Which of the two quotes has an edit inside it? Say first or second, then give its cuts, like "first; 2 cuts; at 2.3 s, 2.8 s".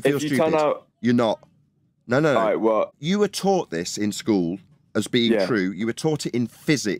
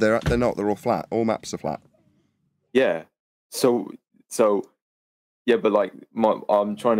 first; 1 cut; at 3.0 s